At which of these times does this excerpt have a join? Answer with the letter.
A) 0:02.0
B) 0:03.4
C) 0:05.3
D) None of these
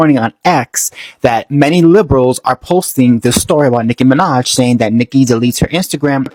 D